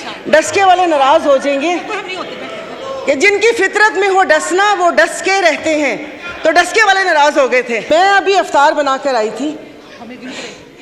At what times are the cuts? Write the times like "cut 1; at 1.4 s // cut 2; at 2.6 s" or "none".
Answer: cut 1; at 7.9 s